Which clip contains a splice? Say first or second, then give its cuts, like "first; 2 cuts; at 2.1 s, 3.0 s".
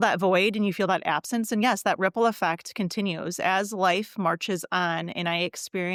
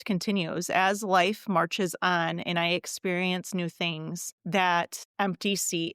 second; 2 cuts; at 4.3 s, 5.0 s